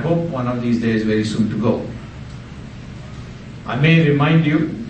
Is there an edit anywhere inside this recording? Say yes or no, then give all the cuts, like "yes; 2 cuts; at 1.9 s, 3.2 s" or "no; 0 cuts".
no; 0 cuts